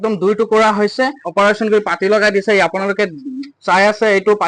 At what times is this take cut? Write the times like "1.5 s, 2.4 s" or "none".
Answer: 1.2 s